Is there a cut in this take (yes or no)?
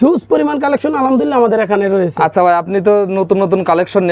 no